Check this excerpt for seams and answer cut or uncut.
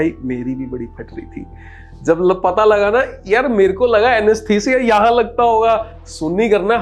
uncut